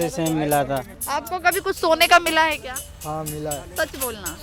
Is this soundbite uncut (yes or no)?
no